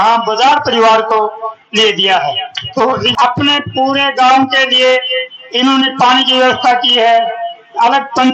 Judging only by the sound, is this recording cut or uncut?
cut